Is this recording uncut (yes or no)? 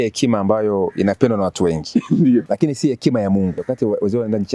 no